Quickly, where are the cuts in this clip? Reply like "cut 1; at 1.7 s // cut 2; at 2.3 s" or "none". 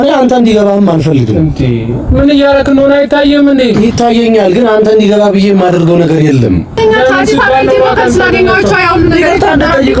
cut 1; at 6.8 s